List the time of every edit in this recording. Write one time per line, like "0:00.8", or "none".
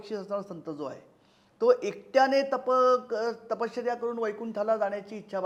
none